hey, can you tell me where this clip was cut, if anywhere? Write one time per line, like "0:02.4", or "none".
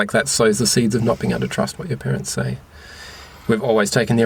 none